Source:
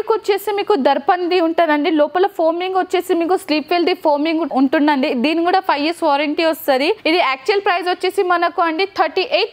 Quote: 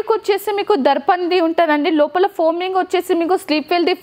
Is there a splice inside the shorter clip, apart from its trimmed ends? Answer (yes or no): no